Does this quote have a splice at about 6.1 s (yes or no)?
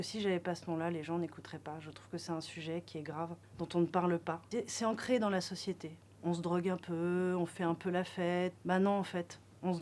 no